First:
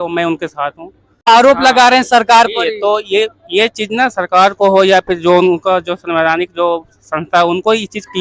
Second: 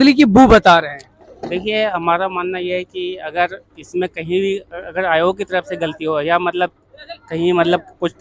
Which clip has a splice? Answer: first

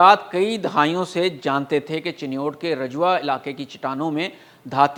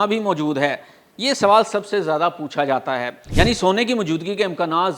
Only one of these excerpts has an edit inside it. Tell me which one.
second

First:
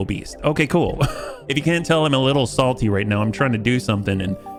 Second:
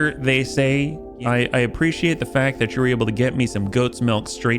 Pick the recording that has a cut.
second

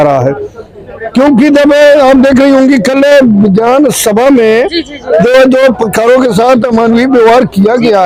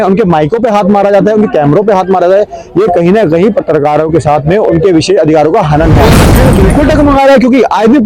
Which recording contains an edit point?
second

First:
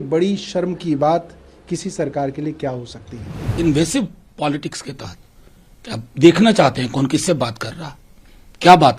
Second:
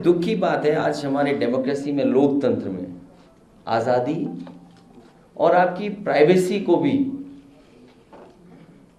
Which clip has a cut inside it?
first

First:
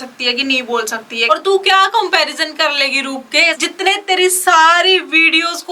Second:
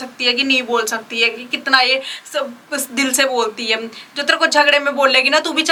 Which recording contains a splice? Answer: first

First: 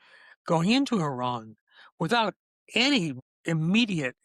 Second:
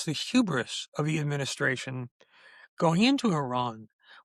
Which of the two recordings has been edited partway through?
first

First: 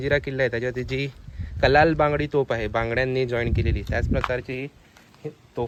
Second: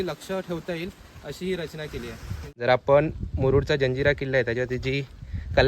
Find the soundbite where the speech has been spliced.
second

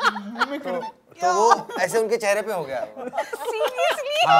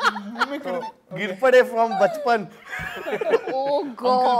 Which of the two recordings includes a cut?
second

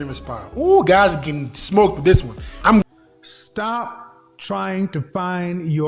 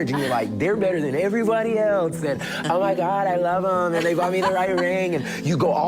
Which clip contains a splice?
first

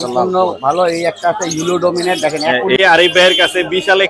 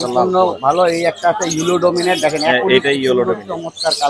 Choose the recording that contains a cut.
first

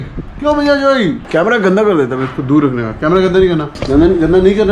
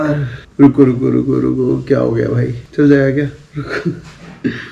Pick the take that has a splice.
first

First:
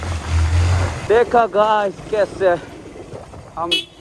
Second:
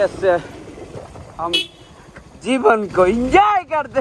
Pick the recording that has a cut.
first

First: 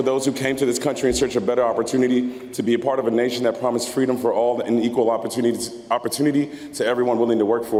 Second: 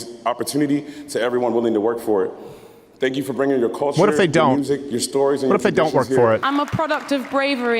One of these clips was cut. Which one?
second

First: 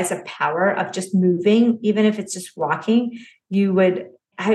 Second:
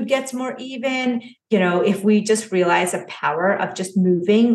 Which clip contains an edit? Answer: second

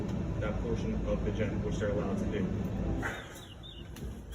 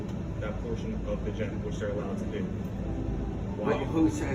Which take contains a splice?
first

